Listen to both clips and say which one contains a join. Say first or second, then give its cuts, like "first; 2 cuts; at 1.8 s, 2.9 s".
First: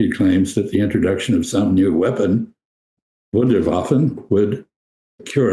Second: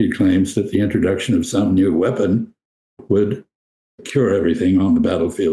second; 1 cut; at 3.0 s